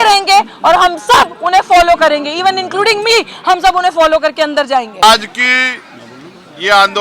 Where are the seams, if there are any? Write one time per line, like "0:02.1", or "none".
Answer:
none